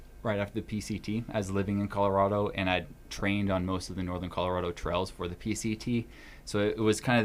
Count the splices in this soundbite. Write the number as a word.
zero